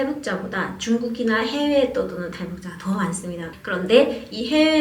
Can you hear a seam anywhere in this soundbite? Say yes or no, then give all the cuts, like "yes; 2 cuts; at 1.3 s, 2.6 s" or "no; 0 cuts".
yes; 1 cut; at 3.5 s